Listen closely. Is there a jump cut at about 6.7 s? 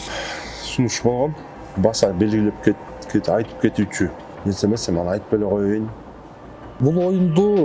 yes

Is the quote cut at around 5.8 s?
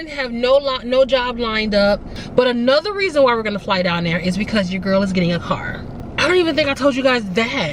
yes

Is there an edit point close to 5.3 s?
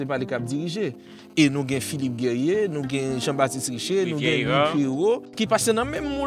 yes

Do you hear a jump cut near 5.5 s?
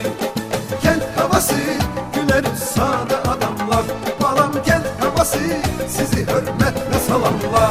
no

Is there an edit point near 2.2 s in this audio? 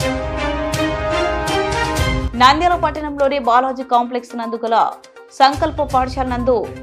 yes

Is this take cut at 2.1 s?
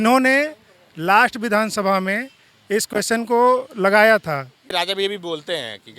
no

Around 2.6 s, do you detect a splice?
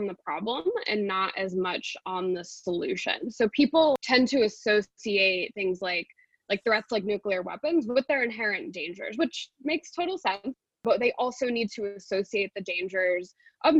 no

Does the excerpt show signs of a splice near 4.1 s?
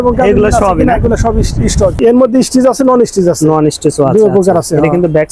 no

